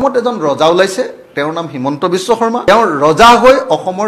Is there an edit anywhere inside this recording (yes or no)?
yes